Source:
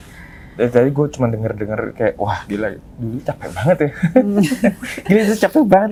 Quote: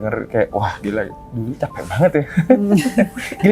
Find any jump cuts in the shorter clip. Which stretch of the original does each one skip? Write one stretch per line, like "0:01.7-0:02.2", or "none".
none